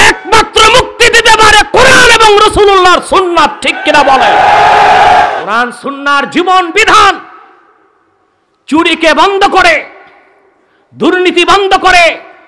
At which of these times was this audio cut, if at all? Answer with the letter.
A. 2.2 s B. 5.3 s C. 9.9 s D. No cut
B